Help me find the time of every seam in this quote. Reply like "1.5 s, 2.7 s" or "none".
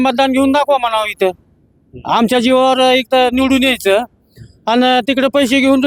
none